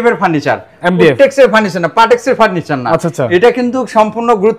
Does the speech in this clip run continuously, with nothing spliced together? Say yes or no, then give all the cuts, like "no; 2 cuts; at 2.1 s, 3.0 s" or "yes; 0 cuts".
yes; 0 cuts